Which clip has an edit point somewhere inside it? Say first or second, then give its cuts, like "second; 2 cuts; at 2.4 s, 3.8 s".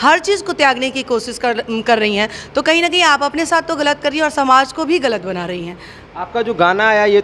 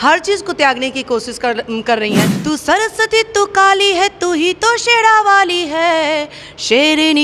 second; 1 cut; at 2.3 s